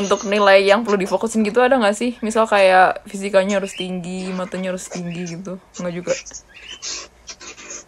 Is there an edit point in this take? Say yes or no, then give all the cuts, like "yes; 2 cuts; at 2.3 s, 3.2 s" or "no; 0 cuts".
no; 0 cuts